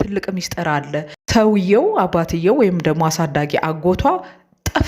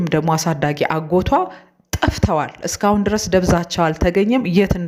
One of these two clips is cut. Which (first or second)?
first